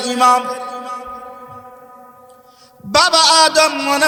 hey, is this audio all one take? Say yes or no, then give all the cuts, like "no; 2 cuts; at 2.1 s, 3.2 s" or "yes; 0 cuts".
yes; 0 cuts